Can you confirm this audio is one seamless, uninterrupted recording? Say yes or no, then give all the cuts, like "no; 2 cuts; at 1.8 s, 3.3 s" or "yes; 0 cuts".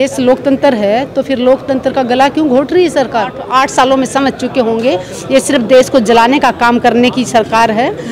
no; 1 cut; at 3.4 s